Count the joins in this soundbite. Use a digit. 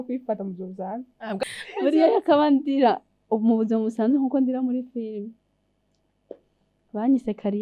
1